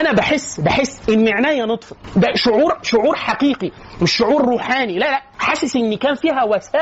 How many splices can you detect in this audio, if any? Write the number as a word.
zero